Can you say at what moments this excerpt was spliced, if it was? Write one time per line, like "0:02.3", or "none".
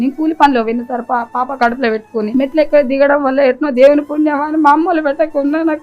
0:02.3